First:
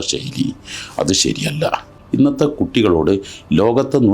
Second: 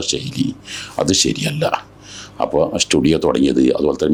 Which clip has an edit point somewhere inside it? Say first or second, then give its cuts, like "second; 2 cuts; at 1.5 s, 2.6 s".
first; 1 cut; at 2.0 s